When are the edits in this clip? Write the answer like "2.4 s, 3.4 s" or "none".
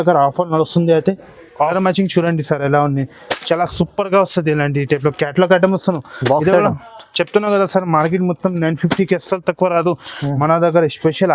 1.7 s